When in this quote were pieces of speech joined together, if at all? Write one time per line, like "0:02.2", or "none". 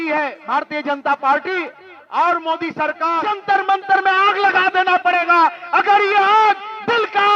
0:03.3